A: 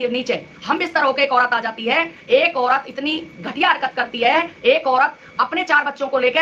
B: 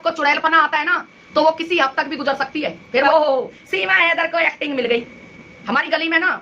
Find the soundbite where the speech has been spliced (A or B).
B